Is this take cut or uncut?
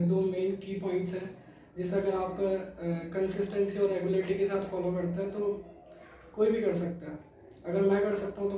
uncut